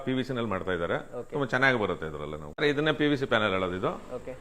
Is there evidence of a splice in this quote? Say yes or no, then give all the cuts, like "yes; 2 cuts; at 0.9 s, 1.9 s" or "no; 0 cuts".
yes; 1 cut; at 2.5 s